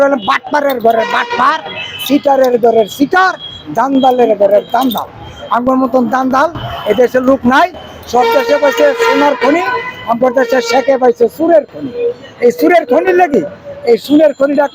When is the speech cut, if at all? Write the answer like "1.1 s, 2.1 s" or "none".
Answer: none